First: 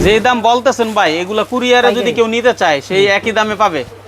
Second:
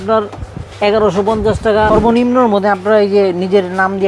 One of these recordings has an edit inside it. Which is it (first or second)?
second